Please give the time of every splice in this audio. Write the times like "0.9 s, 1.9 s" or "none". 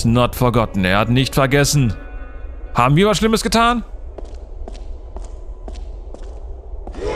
none